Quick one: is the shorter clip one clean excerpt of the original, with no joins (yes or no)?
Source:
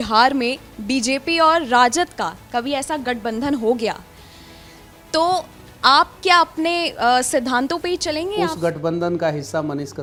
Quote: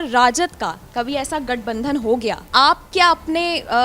no